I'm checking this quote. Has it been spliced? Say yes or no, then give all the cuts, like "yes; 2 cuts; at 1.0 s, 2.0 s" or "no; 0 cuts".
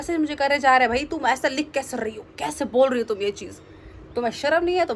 no; 0 cuts